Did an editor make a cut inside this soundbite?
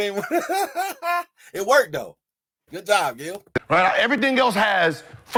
no; 0 cuts

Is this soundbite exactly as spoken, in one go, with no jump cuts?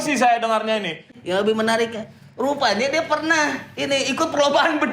no; 1 cut; at 1.1 s

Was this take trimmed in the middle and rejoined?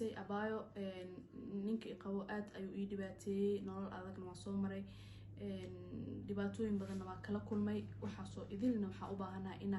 no; 0 cuts

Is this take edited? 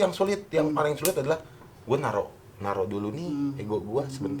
no; 0 cuts

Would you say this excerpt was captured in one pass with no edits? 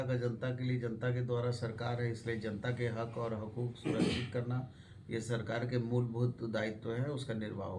yes; 0 cuts

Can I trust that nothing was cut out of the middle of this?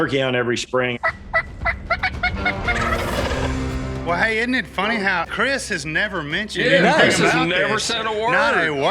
no; 2 cuts; at 0.9 s, 4.0 s

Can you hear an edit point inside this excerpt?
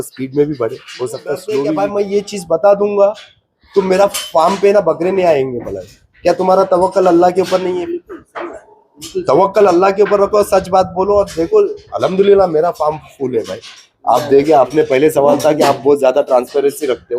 yes; 1 cut; at 1.6 s

